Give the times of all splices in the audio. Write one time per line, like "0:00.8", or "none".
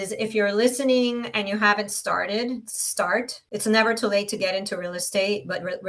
0:03.4